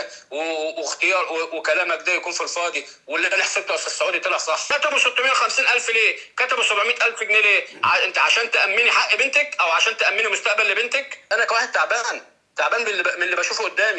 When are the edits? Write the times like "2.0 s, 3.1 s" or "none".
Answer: 4.7 s, 11.2 s